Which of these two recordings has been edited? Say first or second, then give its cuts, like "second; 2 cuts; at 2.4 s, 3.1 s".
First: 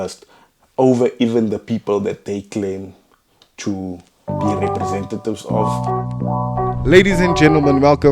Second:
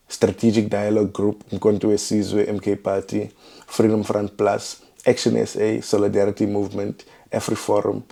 first; 1 cut; at 5.6 s